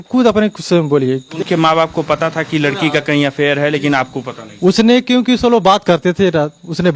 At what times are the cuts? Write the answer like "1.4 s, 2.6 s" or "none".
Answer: 1.3 s